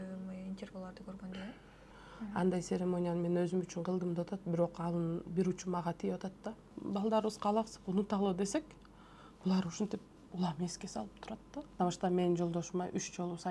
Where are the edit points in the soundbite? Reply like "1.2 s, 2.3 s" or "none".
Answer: 2.0 s, 6.7 s, 11.8 s